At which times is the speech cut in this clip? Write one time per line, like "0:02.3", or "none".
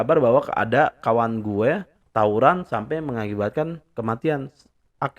0:02.0